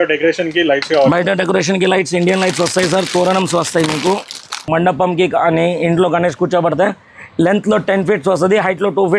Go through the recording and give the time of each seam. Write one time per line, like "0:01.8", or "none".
0:04.7